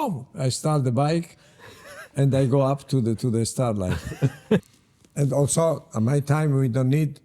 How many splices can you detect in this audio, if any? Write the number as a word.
one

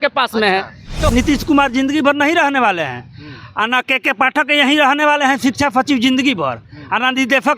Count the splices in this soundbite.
one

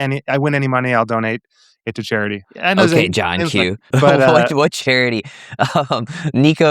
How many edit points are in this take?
two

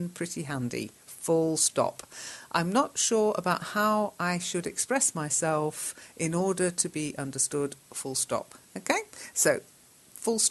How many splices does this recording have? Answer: one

